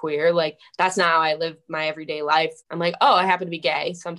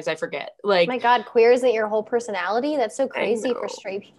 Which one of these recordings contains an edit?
first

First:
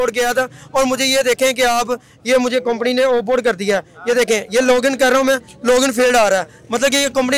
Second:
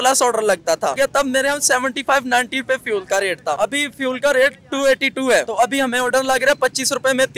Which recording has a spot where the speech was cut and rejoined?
second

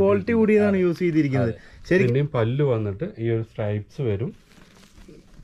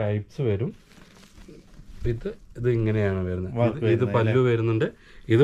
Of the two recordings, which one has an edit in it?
first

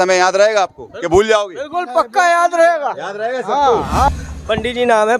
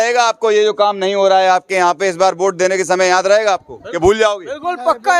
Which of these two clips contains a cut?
first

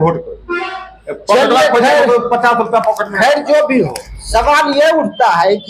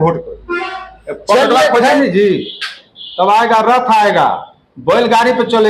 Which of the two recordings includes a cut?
second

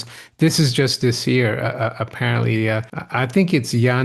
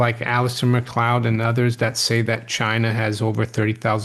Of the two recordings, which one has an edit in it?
first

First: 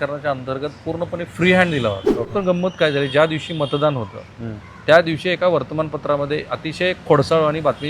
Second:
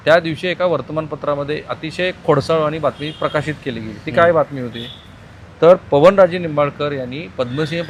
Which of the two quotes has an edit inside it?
first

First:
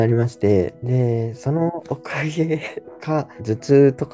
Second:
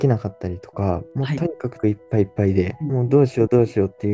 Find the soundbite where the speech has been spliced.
second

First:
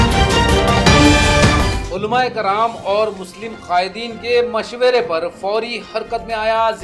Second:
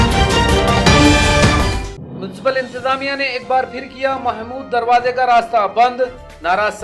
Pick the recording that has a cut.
first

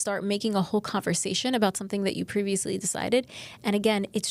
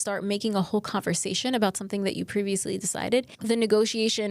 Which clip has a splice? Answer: second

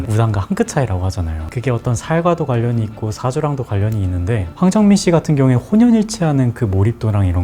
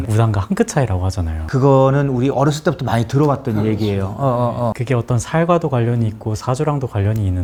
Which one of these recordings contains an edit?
first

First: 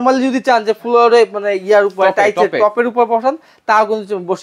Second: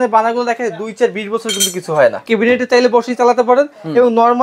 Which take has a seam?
second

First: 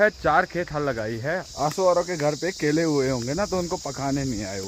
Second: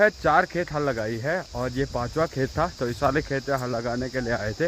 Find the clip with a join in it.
first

